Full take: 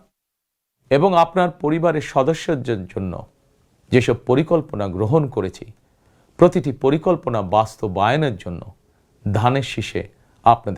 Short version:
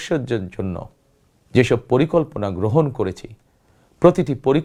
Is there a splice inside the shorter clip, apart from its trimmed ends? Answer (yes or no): no